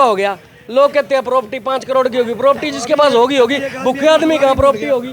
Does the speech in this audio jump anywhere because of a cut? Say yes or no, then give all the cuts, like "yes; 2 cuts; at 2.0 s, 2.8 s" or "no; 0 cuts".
no; 0 cuts